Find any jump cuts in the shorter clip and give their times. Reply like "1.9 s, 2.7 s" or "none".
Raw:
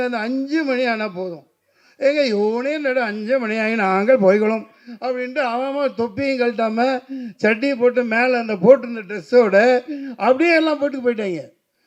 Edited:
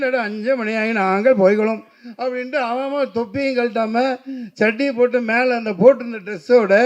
none